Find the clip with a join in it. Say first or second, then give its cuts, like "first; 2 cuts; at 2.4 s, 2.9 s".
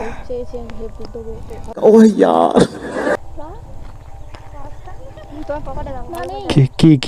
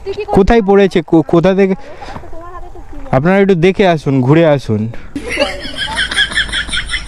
first; 1 cut; at 3.2 s